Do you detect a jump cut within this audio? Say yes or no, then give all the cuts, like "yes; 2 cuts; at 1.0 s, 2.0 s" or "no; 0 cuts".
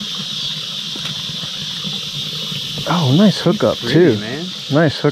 no; 0 cuts